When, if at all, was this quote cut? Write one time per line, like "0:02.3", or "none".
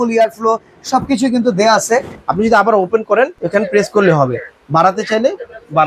0:02.2